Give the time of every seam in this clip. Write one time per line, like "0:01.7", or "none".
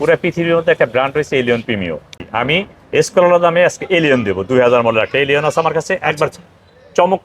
0:02.2